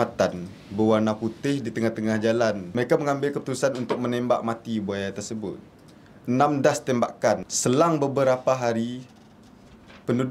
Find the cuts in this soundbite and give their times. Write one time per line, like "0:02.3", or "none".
0:02.6
0:07.5